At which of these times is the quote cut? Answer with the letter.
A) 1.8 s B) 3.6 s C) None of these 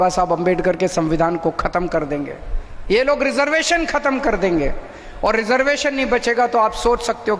C